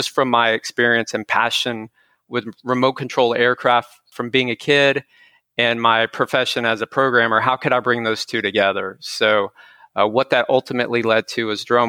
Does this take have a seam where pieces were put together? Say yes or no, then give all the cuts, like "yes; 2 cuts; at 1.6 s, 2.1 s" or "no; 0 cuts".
yes; 1 cut; at 4.1 s